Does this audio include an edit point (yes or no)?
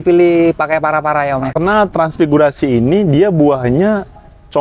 yes